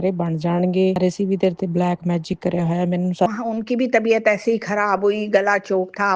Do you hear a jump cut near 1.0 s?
yes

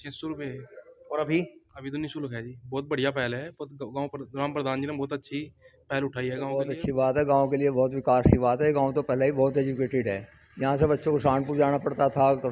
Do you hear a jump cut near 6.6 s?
yes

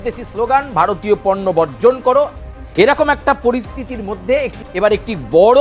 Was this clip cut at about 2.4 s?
yes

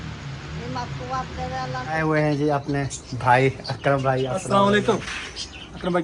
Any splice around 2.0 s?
yes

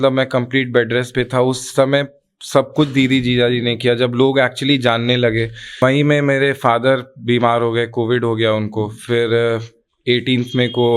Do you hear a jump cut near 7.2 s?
no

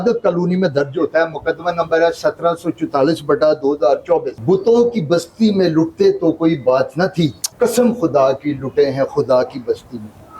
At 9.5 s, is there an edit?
no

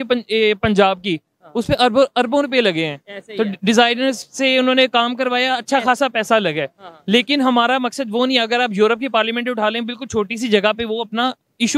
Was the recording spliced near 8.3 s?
no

